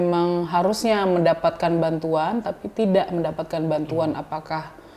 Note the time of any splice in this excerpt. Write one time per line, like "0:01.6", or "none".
none